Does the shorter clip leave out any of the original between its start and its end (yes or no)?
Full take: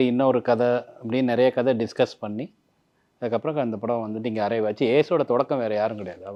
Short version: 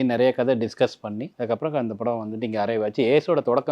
yes